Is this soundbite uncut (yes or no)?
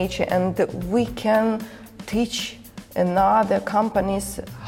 yes